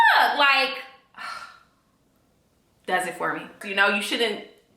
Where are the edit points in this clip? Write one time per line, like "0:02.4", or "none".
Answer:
0:03.6